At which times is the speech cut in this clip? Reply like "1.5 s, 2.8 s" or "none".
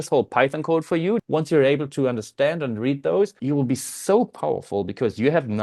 1.2 s, 3.4 s